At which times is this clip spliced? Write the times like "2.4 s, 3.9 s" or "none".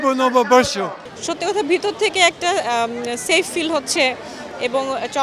1.1 s